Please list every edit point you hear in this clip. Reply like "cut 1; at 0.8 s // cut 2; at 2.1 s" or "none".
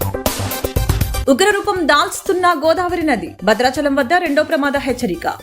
cut 1; at 1.2 s